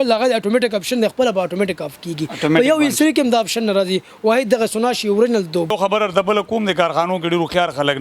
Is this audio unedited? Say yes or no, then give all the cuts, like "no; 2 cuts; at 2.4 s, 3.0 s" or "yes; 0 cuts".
no; 1 cut; at 5.7 s